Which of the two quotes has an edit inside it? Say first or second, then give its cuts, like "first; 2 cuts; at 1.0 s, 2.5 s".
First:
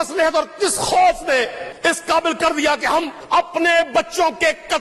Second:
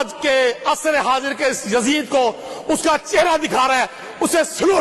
first; 2 cuts; at 1.6 s, 3.2 s